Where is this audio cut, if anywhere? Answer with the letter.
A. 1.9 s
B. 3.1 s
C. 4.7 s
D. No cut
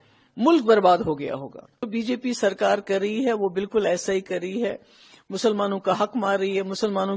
A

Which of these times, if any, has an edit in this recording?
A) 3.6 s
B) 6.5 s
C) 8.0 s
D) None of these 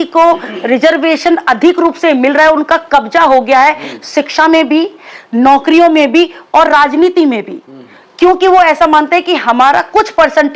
D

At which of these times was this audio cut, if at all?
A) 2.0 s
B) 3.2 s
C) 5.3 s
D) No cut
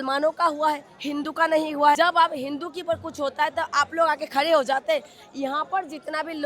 A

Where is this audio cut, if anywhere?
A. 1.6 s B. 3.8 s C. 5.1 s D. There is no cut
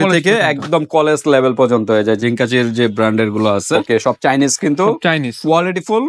B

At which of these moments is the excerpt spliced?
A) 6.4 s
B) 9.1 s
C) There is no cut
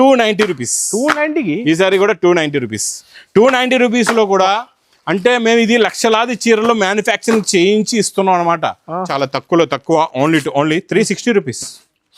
B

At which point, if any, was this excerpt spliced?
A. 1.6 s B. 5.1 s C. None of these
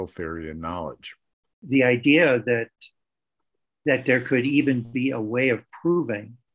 A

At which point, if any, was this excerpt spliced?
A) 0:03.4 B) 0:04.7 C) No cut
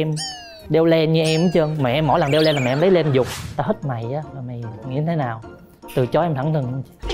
A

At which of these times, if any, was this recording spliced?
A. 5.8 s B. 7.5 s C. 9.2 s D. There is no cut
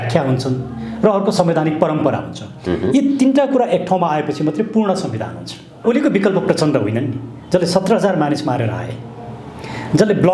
A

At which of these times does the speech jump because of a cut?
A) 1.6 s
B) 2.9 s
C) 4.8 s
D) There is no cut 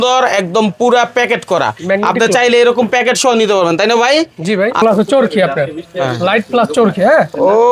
C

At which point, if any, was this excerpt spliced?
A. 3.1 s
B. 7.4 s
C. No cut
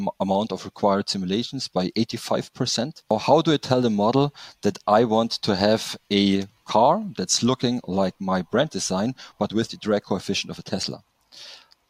A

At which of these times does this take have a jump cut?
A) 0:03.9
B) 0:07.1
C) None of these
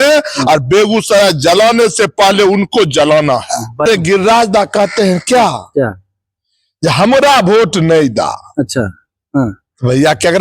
A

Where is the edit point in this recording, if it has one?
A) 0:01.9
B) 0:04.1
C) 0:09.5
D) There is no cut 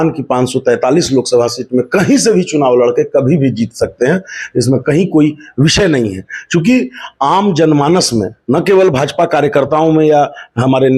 D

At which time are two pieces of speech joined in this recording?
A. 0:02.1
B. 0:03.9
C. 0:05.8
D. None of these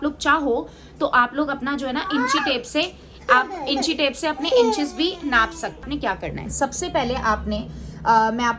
C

